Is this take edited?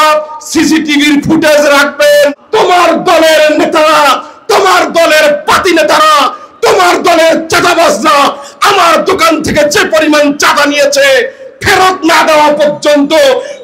yes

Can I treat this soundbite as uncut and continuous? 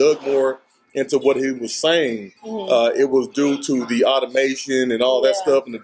yes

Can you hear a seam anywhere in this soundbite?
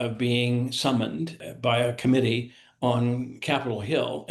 yes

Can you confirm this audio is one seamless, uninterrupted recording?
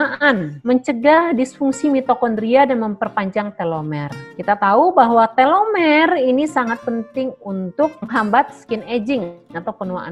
yes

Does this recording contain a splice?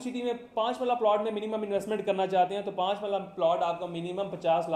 no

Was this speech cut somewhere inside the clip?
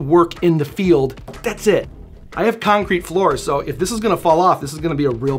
yes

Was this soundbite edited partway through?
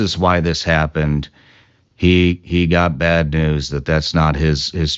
no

